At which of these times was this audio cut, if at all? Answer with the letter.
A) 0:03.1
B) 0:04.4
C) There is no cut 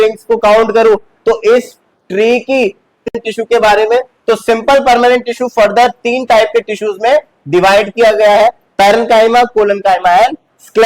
A